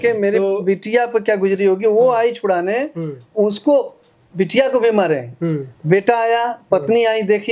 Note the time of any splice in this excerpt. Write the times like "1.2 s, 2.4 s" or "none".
none